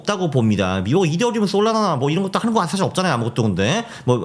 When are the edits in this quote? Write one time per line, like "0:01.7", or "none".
none